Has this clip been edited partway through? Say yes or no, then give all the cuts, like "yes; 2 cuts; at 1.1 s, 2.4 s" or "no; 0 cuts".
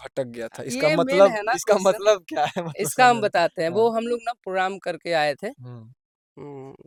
no; 0 cuts